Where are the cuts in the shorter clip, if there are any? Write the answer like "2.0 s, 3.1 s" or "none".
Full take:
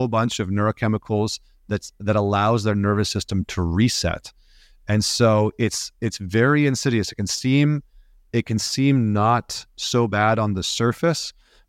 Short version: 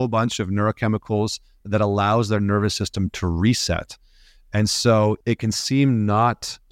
1.6 s, 5.2 s